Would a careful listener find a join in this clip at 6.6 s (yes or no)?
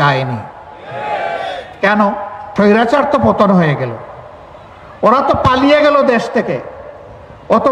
no